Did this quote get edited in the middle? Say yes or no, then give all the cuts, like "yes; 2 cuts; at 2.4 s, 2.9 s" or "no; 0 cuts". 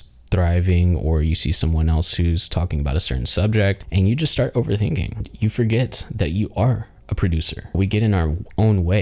yes; 3 cuts; at 3.8 s, 5.3 s, 7.8 s